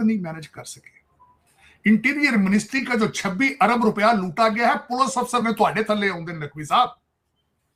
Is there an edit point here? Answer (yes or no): no